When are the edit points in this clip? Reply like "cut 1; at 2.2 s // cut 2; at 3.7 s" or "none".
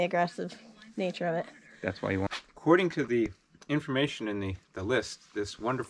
cut 1; at 2.3 s